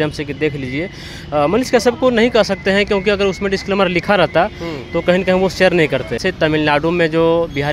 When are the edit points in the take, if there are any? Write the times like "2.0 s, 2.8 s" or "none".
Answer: 6.2 s